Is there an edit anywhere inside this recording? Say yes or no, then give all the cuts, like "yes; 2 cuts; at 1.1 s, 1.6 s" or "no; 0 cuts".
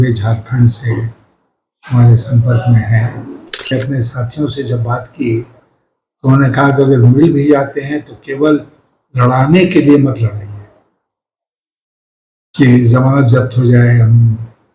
yes; 1 cut; at 3.7 s